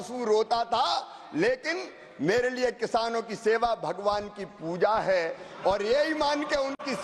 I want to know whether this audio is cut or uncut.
uncut